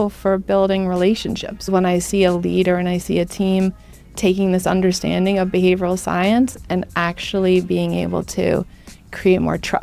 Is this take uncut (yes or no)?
no